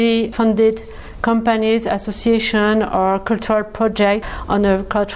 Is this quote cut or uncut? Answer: uncut